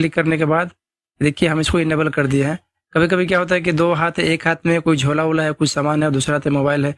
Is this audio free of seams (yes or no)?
yes